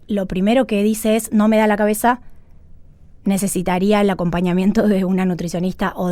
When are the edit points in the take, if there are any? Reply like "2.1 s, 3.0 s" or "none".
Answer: none